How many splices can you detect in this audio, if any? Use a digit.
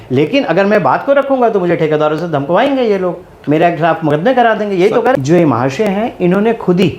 1